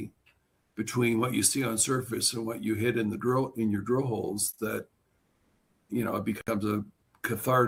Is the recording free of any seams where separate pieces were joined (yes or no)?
yes